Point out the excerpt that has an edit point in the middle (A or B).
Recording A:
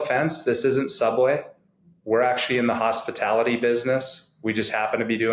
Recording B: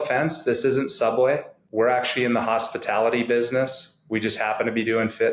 B